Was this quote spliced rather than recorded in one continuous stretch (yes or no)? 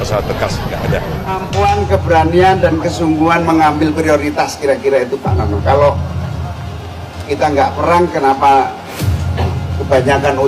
yes